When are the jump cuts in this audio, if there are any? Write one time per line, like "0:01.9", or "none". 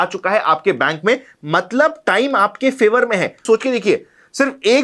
0:03.4